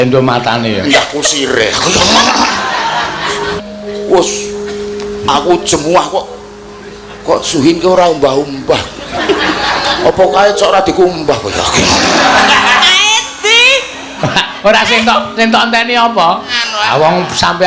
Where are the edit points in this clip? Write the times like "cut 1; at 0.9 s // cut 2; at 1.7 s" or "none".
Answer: cut 1; at 3.5 s // cut 2; at 16.6 s